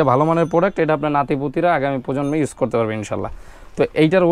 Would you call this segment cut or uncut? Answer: uncut